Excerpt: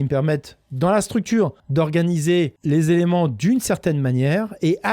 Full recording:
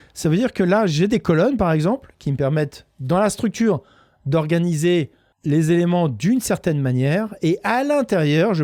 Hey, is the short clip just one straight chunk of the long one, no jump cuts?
no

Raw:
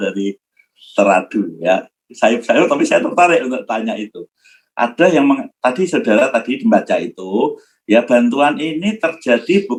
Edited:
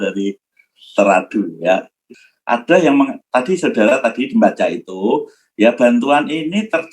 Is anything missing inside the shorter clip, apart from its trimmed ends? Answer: yes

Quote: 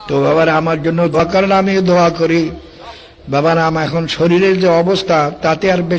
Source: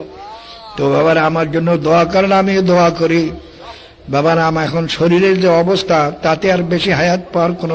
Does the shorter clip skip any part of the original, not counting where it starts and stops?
yes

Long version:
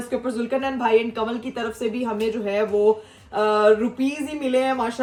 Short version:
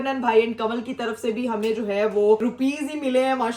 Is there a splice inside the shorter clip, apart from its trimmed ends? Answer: yes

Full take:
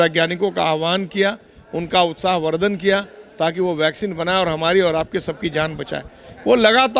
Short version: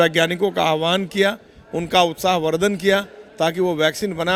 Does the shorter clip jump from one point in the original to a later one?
no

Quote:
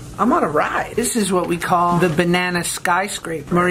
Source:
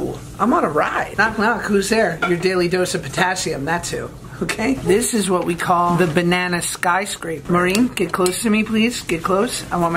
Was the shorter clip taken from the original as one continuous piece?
no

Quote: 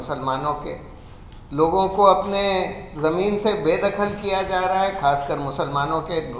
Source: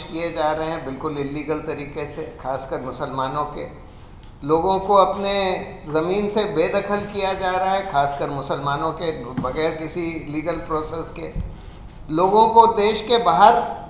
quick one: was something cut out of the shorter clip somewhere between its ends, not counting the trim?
no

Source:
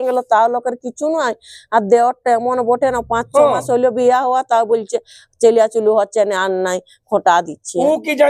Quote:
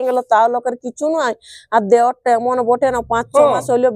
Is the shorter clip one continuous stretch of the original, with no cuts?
yes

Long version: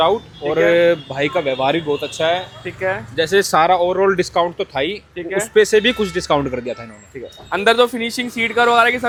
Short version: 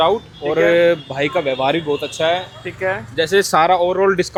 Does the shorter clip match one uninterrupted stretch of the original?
yes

